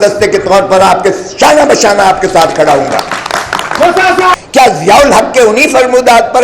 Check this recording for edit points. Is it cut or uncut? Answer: cut